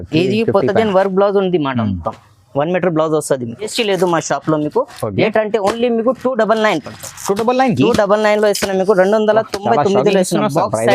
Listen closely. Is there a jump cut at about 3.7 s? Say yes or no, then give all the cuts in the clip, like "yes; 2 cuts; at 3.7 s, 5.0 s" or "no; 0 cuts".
yes; 1 cut; at 3.7 s